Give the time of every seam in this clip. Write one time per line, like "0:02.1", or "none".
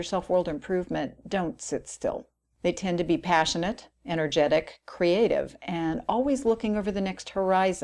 0:05.2